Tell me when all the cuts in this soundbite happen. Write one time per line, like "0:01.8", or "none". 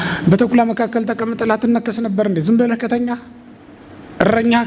none